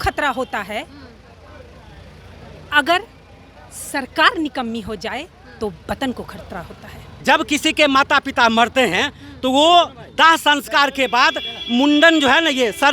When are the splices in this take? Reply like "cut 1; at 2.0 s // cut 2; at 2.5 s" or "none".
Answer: cut 1; at 7.1 s